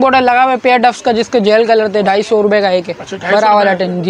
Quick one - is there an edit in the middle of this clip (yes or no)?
no